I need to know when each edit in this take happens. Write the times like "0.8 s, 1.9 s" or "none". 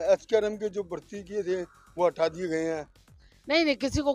none